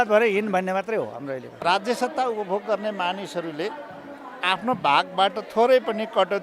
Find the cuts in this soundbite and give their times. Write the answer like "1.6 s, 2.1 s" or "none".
1.5 s